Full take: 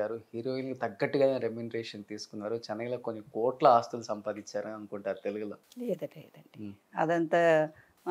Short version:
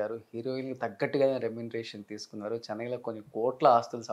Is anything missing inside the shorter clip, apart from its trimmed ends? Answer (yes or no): no